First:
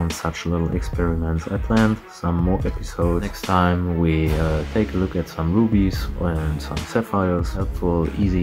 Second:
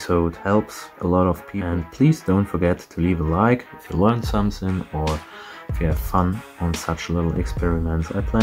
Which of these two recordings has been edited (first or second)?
second